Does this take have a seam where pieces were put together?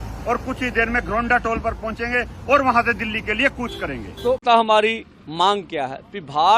yes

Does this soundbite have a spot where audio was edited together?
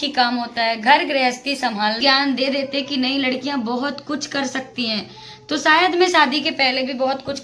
yes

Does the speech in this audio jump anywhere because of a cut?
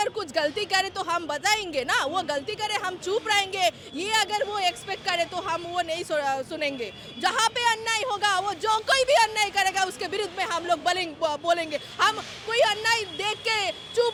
no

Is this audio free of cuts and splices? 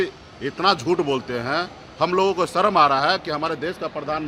yes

